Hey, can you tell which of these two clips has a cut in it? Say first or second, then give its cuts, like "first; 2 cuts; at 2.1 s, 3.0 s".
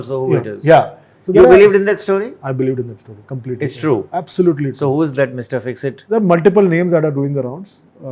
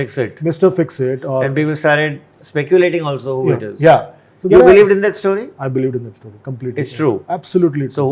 first; 1 cut; at 6.0 s